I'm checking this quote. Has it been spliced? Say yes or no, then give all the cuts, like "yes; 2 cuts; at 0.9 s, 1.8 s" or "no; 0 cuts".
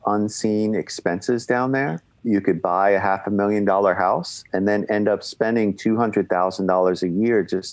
yes; 1 cut; at 2.1 s